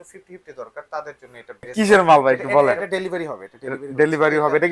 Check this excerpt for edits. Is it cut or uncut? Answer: cut